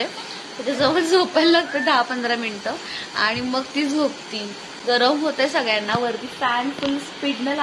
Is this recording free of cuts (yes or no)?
yes